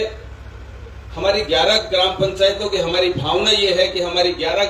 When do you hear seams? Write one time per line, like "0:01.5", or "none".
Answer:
none